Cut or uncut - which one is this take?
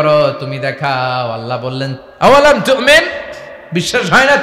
cut